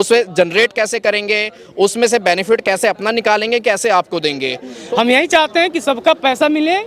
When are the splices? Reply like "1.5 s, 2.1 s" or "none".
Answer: 4.7 s